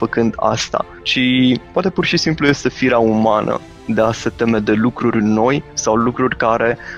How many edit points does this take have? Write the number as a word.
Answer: three